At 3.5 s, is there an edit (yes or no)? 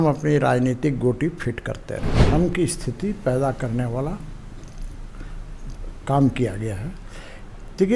no